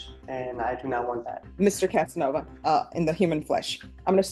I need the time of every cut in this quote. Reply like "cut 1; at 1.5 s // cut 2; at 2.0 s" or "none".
cut 1; at 1.4 s // cut 2; at 2.5 s